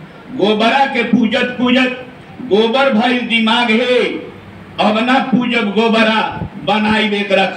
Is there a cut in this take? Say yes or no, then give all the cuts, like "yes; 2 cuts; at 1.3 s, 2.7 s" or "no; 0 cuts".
no; 0 cuts